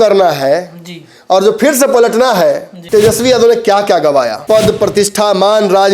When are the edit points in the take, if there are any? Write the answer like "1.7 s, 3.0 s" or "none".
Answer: 2.7 s, 4.4 s